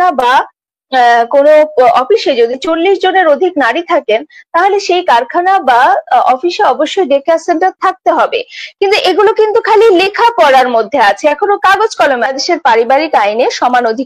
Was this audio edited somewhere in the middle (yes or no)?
yes